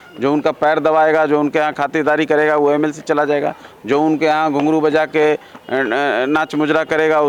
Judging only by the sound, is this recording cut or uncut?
uncut